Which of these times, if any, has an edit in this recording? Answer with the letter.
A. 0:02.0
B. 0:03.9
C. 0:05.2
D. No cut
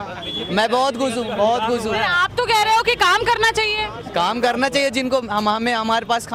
D